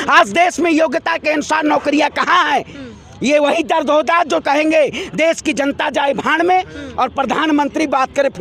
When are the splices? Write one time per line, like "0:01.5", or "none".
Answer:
none